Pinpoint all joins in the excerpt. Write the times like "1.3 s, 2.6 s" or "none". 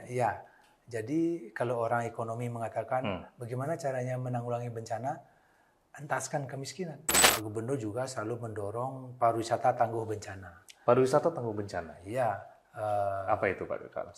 7.2 s